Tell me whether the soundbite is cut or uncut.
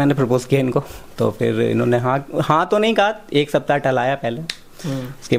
uncut